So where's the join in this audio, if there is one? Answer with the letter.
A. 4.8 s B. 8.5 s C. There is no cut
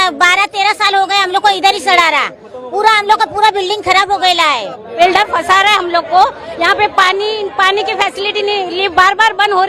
A